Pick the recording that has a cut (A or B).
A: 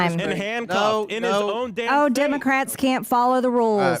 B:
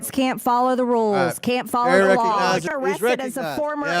B